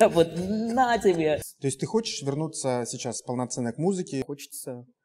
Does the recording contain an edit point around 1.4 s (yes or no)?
yes